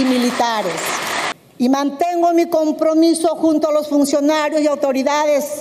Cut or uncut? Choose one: cut